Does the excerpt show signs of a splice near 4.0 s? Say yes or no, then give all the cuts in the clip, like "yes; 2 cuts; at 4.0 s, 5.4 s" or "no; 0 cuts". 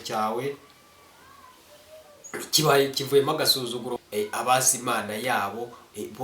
yes; 1 cut; at 4.0 s